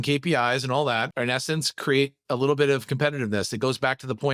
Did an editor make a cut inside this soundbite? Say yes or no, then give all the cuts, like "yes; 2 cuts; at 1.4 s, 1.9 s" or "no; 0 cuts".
no; 0 cuts